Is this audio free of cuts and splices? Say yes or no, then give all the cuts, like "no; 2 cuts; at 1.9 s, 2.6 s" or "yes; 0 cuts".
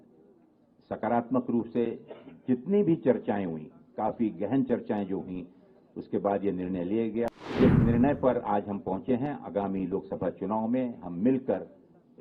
no; 1 cut; at 7.3 s